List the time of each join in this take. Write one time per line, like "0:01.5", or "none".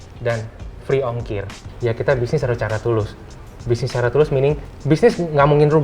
0:01.6
0:04.7